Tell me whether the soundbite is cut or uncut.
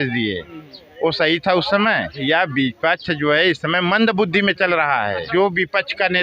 cut